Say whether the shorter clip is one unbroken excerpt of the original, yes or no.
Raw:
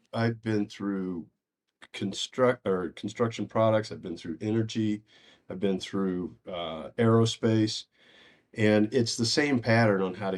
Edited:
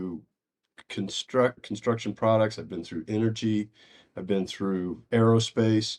no